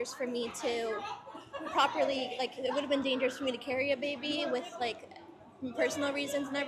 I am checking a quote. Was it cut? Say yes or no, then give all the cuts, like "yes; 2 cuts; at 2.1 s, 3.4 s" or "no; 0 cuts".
yes; 1 cut; at 1.5 s